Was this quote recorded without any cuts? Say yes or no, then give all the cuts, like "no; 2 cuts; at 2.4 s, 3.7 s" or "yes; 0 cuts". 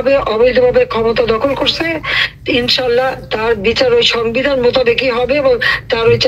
yes; 0 cuts